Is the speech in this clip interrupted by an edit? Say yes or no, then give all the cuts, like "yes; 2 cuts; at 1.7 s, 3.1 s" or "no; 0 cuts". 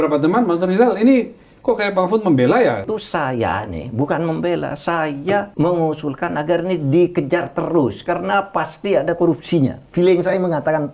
yes; 2 cuts; at 2.9 s, 5.5 s